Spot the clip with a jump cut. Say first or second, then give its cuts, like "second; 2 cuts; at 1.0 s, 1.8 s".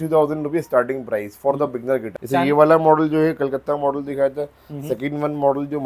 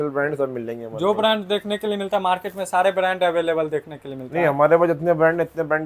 first; 1 cut; at 2.1 s